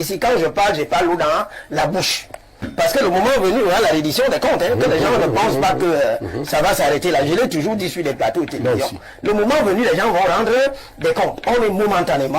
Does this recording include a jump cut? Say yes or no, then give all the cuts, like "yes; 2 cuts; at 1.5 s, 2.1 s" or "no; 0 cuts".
yes; 1 cut; at 2.7 s